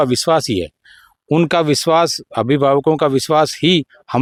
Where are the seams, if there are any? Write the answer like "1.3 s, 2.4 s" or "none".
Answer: none